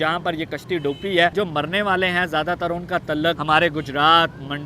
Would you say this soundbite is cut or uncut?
cut